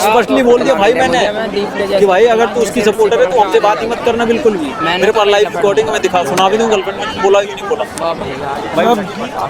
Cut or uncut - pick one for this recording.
uncut